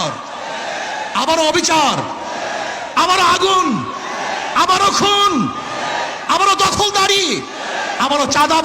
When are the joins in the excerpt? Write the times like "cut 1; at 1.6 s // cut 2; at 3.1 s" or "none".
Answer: none

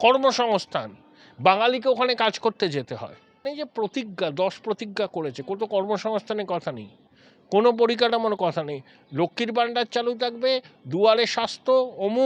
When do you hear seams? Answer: cut 1; at 3.4 s

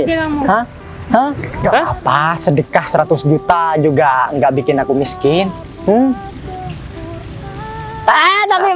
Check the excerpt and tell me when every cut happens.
cut 1; at 1.5 s

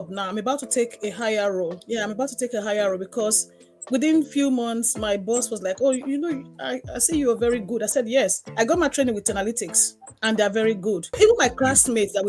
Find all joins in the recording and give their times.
cut 1; at 11.1 s

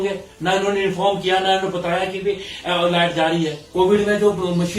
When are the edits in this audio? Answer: cut 1; at 3.6 s

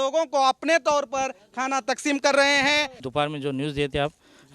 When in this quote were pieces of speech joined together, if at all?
cut 1; at 3.0 s

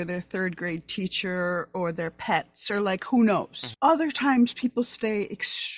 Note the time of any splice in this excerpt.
none

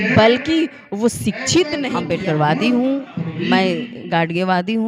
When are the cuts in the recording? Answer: cut 1; at 2.0 s

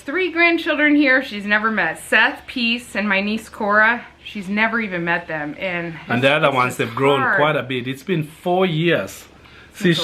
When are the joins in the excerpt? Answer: none

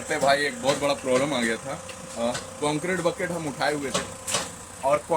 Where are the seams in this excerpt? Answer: none

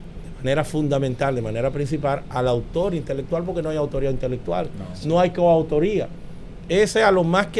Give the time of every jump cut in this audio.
none

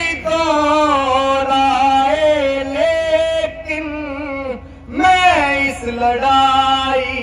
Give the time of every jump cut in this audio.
none

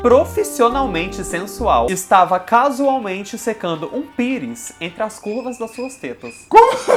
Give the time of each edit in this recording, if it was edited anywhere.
none

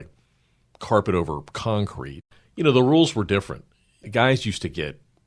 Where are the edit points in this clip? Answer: cut 1; at 2.3 s // cut 2; at 4.1 s

